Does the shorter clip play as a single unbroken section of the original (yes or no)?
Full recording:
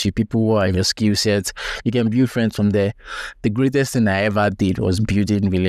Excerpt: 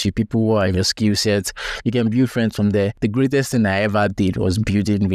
no